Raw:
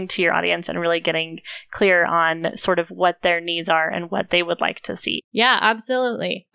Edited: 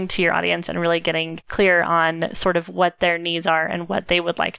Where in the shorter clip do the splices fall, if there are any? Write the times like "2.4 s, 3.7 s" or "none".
1.4 s